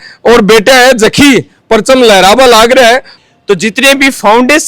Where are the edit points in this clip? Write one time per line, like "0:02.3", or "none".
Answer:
0:03.1